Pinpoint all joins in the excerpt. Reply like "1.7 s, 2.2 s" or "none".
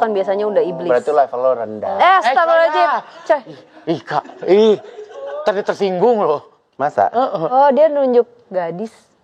none